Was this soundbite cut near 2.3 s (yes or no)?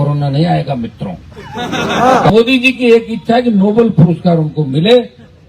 yes